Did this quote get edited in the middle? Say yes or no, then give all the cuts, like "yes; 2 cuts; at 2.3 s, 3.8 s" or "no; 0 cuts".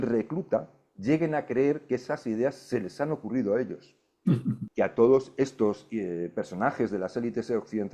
yes; 1 cut; at 4.6 s